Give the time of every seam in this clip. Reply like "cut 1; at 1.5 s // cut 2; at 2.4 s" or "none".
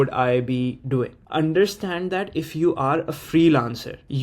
cut 1; at 1.2 s